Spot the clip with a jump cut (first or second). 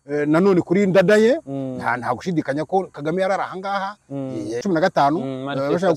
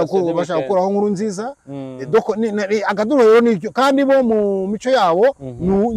first